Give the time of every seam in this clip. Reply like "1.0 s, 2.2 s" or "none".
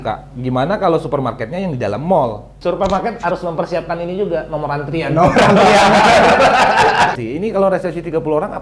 2.5 s, 7.1 s